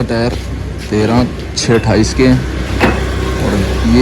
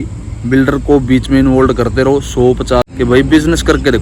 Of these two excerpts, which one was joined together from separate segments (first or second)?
second